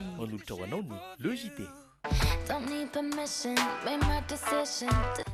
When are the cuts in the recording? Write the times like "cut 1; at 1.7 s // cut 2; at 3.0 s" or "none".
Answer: none